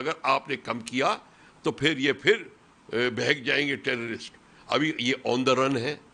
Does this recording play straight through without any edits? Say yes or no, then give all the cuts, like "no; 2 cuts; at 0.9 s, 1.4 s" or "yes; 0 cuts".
yes; 0 cuts